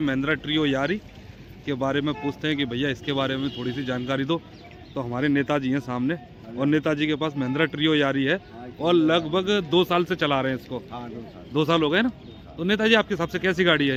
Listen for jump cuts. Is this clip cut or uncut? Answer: uncut